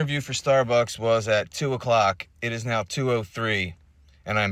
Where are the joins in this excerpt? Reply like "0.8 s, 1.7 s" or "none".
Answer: none